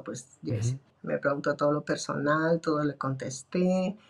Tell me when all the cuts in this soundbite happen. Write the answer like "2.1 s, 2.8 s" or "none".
0.9 s